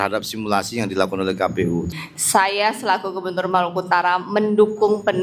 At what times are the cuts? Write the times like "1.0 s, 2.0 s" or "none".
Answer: 1.9 s